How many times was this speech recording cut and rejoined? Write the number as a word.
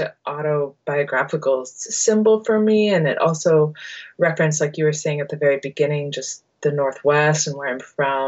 zero